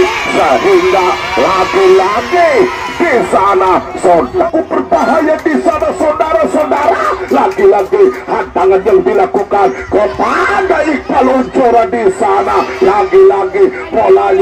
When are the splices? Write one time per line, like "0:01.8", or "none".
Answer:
0:04.4